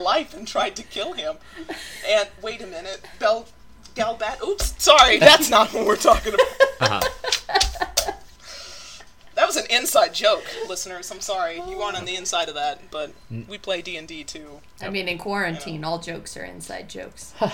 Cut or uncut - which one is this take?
uncut